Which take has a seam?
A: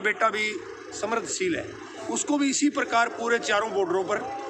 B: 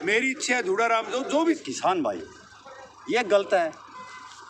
B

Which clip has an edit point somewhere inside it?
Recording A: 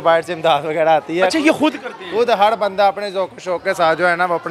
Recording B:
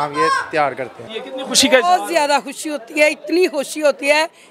B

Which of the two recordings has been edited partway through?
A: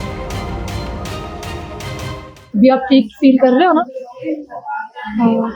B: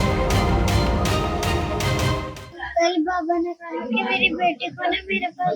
B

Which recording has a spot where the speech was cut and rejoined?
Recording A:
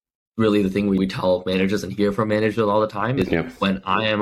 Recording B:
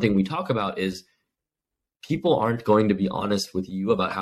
A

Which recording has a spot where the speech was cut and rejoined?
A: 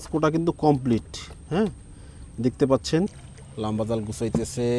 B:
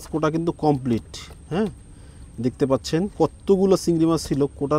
A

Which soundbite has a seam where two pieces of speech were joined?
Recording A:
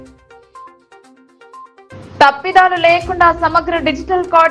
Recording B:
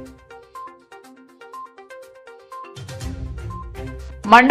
B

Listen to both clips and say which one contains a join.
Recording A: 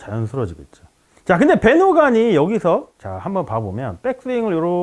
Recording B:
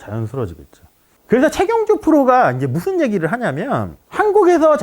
B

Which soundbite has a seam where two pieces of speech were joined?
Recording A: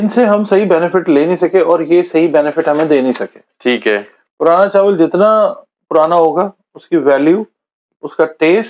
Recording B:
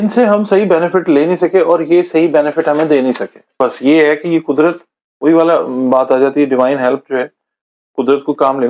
B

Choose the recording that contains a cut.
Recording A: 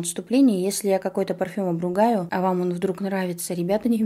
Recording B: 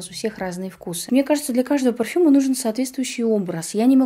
B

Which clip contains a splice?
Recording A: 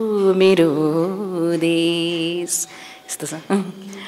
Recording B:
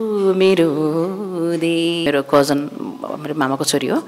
B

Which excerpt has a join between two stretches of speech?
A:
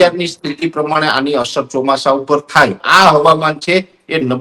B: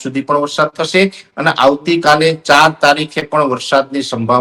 A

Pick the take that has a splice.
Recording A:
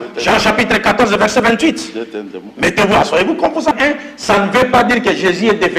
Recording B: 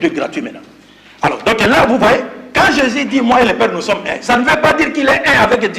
A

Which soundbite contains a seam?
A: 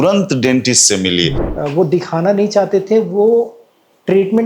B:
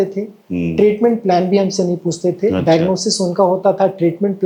A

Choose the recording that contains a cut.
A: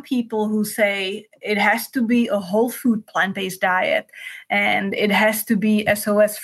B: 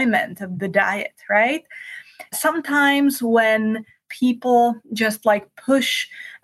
B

